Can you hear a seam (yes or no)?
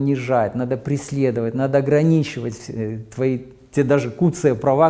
no